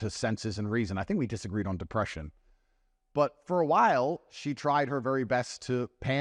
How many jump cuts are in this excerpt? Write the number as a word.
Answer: zero